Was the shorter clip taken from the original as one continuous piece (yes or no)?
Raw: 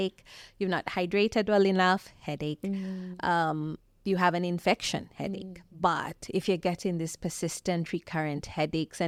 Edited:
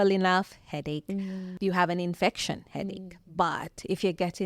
no